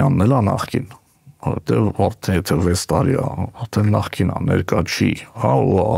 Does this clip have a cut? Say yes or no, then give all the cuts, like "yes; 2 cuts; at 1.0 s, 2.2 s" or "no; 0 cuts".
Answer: no; 0 cuts